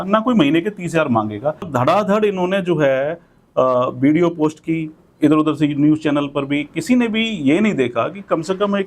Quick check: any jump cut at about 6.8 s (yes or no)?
no